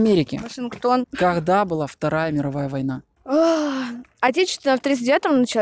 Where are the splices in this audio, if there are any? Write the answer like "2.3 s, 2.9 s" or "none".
1.1 s, 3.1 s